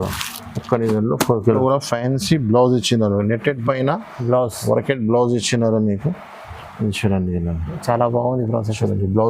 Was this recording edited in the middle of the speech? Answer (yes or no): yes